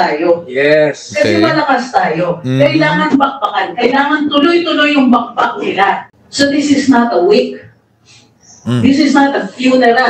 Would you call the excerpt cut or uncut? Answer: cut